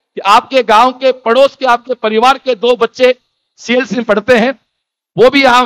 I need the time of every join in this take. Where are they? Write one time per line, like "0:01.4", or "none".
none